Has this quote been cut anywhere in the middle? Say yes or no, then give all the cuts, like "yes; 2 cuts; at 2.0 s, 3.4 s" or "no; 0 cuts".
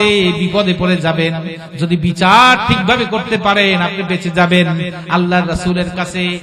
no; 0 cuts